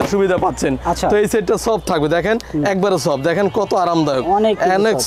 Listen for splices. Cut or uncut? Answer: uncut